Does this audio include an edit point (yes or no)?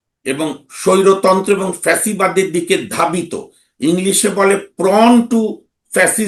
no